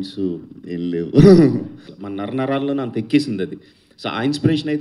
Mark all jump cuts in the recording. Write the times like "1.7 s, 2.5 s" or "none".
1.9 s